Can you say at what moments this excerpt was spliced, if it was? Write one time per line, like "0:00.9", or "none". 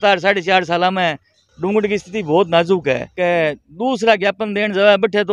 0:01.4
0:03.1